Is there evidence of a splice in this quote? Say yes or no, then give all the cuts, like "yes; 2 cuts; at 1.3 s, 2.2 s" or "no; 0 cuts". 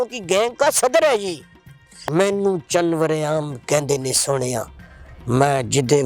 yes; 1 cut; at 2.0 s